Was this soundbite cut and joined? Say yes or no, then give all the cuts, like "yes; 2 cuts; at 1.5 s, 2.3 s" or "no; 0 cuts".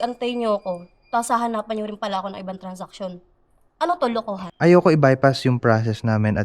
yes; 1 cut; at 4.4 s